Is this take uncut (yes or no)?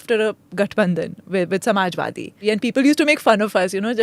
no